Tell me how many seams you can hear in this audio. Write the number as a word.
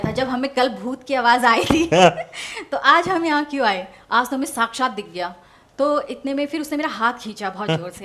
zero